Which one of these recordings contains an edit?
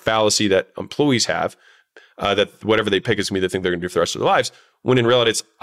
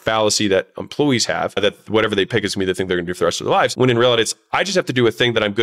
second; 2 cuts; at 1.6 s, 3.7 s

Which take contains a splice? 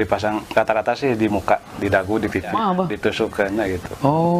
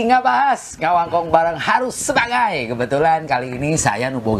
first; 1 cut; at 2.5 s

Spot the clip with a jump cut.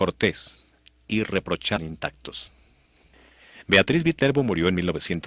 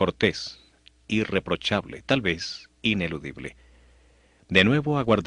second; 1 cut; at 1.8 s

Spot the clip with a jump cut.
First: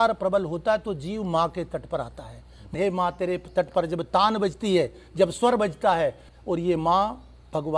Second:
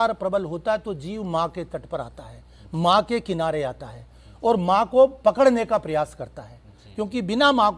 first; 2 cuts; at 2.7 s, 6.3 s

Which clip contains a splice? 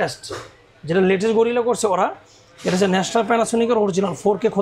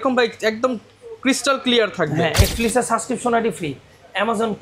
second; 1 cut; at 2.4 s

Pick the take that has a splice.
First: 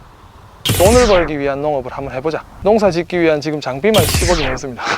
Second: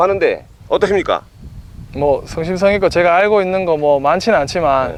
first; 1 cut; at 2.5 s

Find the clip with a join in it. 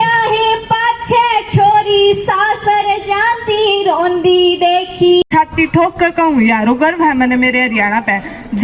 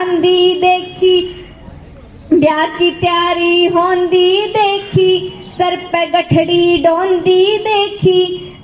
first; 1 cut; at 5.2 s

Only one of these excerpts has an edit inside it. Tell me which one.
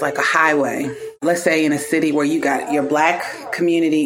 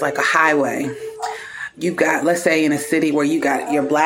first; 1 cut; at 1.2 s

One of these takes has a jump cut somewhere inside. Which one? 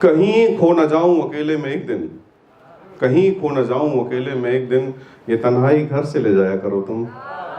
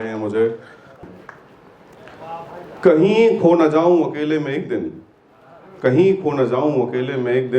second; 1 cut; at 1.0 s

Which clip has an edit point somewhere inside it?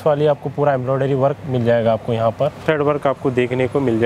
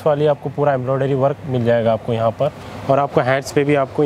first; 1 cut; at 2.6 s

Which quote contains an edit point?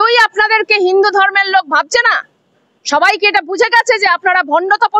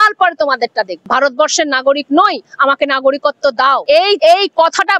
second; 2 cuts; at 1.0 s, 4.1 s

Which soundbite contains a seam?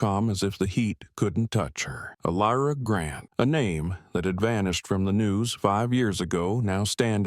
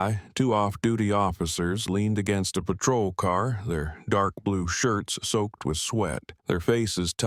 first; 1 cut; at 3.2 s

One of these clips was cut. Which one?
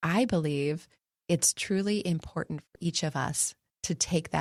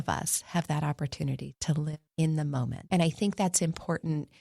second; 2 cuts; at 2.0 s, 2.9 s

